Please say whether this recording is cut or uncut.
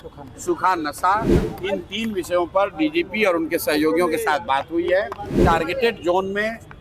cut